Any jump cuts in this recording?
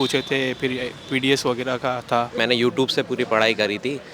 yes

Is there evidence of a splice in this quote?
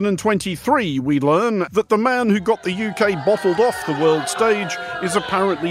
yes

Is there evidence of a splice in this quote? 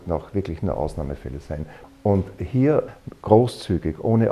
yes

